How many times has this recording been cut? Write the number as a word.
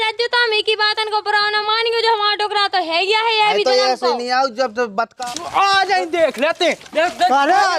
one